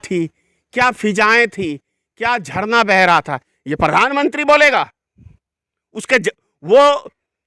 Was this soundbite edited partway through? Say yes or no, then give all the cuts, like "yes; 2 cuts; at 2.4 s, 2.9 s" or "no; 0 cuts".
no; 0 cuts